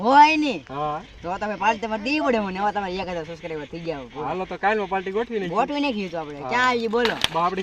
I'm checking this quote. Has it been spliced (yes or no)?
no